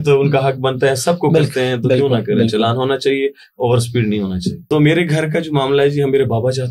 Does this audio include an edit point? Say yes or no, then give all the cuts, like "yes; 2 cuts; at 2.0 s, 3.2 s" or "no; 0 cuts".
yes; 1 cut; at 4.6 s